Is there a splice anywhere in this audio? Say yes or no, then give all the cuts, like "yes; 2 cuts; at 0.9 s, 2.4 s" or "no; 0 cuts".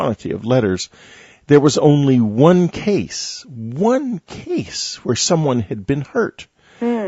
yes; 1 cut; at 5.7 s